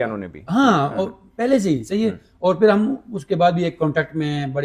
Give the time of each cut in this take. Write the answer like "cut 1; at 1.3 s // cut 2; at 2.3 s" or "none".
none